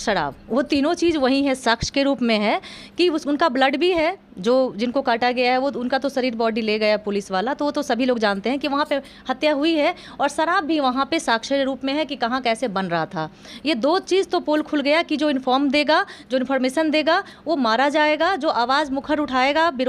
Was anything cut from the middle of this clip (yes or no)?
no